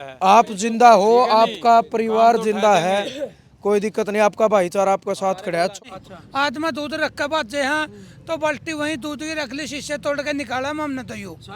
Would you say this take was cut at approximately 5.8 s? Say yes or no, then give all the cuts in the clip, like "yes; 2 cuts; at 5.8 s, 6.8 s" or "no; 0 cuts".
yes; 1 cut; at 5.8 s